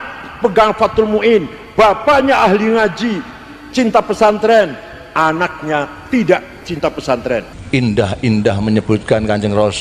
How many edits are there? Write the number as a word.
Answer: one